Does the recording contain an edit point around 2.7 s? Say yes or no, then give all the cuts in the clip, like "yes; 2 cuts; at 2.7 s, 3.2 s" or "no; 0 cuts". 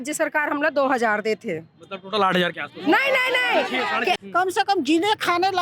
no; 1 cut; at 4.2 s